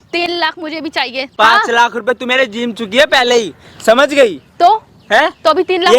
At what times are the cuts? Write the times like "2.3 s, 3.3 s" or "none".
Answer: 1.3 s